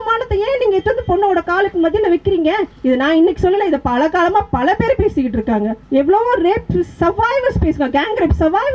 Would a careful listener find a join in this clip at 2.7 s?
yes; 2 cuts; at 2.7 s, 5.8 s

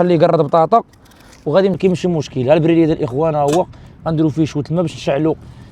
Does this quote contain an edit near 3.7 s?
no; 1 cut; at 1.8 s

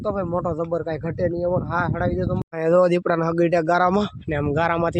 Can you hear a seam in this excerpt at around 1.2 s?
no; 1 cut; at 2.7 s

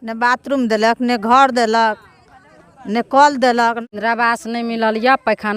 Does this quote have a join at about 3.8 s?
yes; 1 cut; at 3.8 s

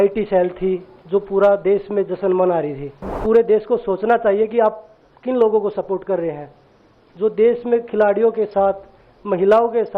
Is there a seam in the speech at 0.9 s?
yes; 2 cuts; at 0.9 s, 3.2 s

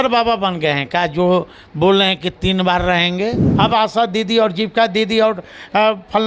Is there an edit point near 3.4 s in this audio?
yes; 1 cut; at 3.4 s

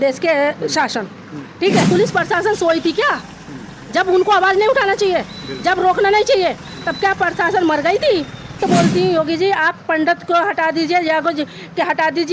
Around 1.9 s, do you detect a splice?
yes; 2 cuts; at 1.9 s, 8.6 s

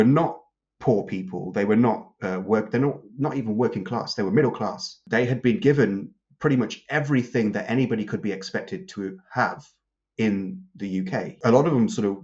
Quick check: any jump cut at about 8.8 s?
no; 2 cuts; at 5.0 s, 11.3 s

